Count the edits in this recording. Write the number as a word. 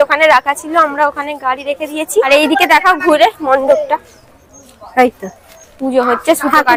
zero